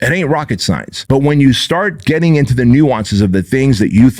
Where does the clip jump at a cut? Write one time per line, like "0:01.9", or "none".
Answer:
0:00.9